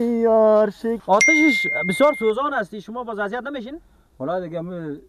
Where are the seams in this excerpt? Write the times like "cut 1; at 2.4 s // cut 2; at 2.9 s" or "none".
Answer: cut 1; at 1.0 s